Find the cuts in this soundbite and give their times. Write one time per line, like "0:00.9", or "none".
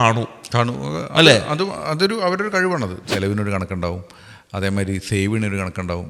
0:03.0